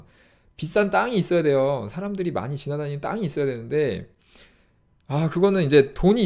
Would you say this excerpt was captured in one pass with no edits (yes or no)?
yes